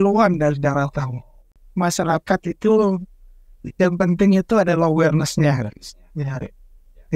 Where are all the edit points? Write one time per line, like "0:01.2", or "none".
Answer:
0:01.6